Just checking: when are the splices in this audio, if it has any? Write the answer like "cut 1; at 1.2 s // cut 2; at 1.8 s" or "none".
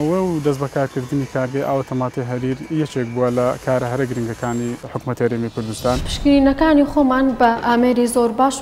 cut 1; at 4.8 s // cut 2; at 6.1 s // cut 3; at 7.5 s